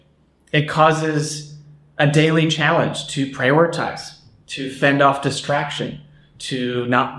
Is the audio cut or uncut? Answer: uncut